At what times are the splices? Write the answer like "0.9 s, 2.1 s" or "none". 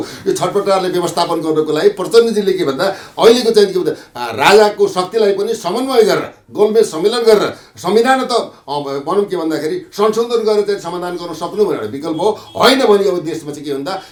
none